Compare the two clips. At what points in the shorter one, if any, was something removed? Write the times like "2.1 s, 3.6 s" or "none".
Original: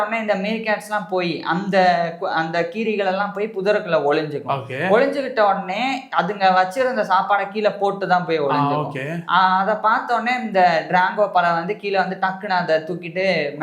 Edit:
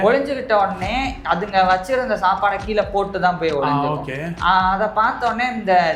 none